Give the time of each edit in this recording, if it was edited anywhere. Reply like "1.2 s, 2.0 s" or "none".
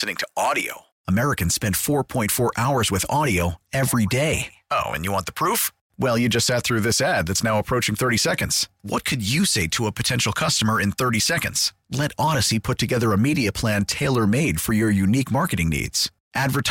none